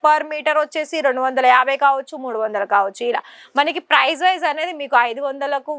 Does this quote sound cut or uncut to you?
uncut